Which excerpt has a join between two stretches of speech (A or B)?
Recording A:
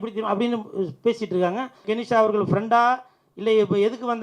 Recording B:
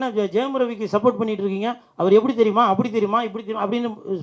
A